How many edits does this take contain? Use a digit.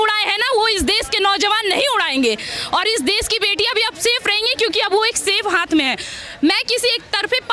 0